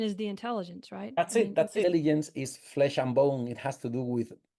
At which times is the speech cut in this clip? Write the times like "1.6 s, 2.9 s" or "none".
1.8 s